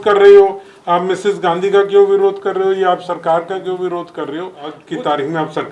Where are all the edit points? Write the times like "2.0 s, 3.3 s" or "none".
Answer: 4.8 s